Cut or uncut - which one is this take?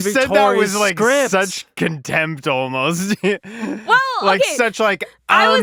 uncut